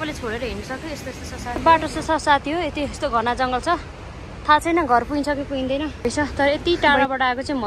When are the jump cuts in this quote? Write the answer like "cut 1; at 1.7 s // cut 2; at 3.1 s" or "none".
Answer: cut 1; at 1.5 s // cut 2; at 6.1 s